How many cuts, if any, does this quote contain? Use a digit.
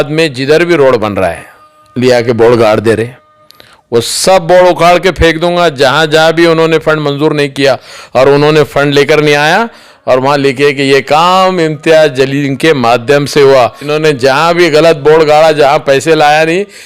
1